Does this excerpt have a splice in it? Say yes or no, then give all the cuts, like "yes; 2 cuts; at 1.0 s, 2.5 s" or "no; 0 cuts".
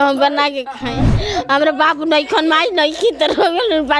yes; 1 cut; at 1.2 s